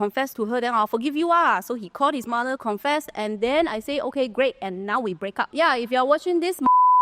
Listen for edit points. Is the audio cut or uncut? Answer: cut